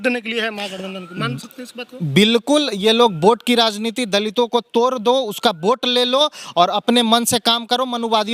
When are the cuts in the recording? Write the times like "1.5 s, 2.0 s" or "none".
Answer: none